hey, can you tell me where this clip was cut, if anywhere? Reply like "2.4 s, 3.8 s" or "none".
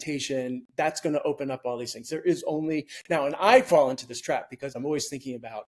4.8 s